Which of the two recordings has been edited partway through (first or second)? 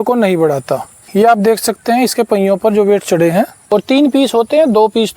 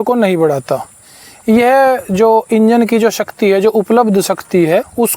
first